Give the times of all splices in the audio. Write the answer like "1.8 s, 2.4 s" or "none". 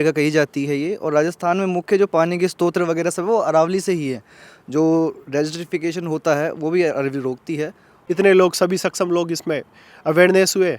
7.9 s